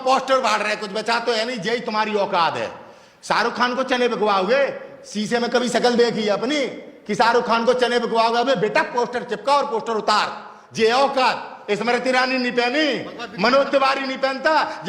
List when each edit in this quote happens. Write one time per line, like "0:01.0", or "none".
0:11.5